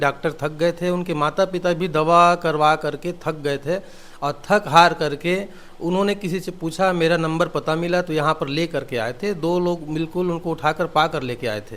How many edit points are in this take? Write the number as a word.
zero